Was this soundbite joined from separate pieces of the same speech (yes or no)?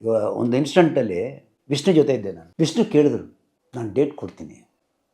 yes